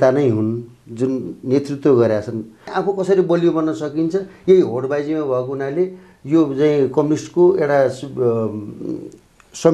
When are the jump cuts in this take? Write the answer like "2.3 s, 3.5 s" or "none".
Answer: 2.7 s

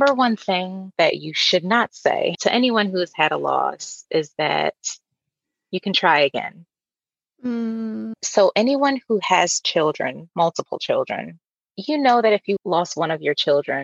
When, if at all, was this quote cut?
2.4 s

